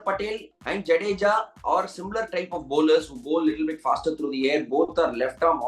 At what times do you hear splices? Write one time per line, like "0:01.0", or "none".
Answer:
none